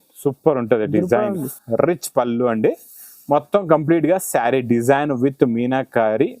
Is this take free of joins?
no; 1 cut; at 1.6 s

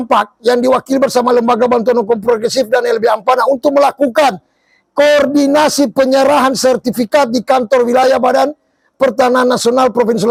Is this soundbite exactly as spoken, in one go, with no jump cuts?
yes; 0 cuts

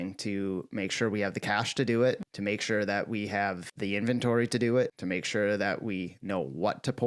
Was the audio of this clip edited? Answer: yes; 3 cuts; at 2.3 s, 3.7 s, 5.0 s

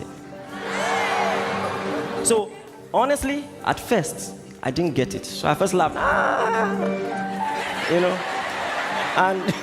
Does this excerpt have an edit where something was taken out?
no; 0 cuts

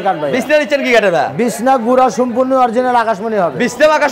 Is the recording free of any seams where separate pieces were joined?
yes; 0 cuts

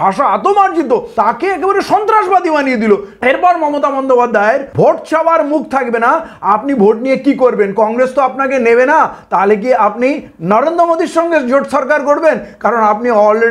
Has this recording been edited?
yes; 3 cuts; at 1.1 s, 3.1 s, 4.7 s

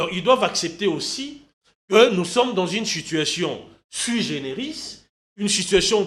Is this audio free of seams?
yes; 0 cuts

